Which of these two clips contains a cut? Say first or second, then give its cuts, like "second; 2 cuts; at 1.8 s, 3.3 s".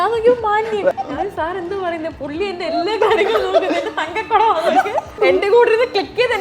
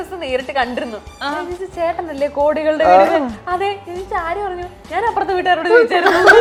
first; 2 cuts; at 0.9 s, 5.2 s